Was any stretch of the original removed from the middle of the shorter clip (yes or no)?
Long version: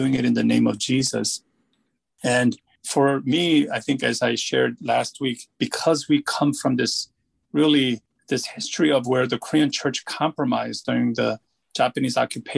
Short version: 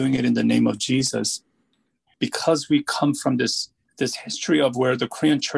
yes